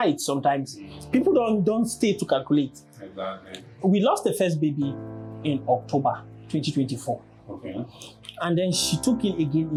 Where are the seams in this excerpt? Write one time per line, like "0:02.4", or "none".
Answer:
none